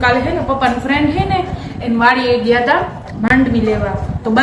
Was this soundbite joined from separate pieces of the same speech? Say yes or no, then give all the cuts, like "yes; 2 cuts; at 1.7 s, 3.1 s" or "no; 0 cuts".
no; 0 cuts